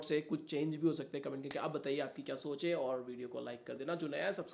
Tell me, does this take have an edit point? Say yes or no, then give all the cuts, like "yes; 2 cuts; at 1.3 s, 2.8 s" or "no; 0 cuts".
no; 0 cuts